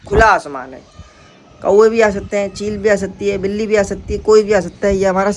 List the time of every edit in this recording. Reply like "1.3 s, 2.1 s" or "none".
none